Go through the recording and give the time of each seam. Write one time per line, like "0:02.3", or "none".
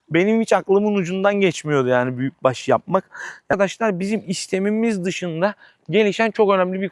0:03.5

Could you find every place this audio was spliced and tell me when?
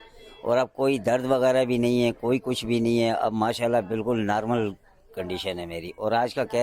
none

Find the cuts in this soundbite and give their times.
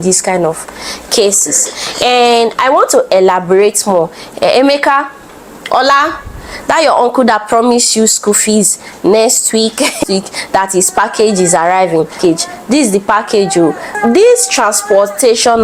none

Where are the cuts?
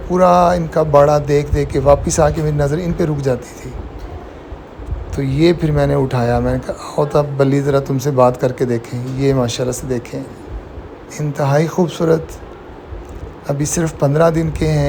none

